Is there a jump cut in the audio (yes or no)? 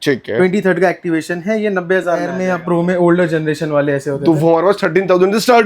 yes